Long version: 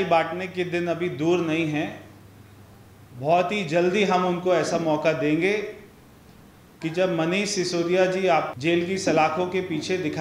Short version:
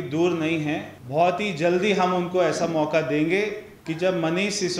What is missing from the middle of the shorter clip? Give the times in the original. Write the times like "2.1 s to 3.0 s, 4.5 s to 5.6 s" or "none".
2.0 s to 3.1 s, 5.8 s to 6.7 s